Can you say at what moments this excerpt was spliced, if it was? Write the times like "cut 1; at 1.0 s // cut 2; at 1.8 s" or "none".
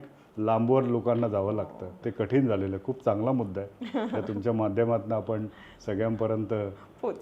cut 1; at 2.0 s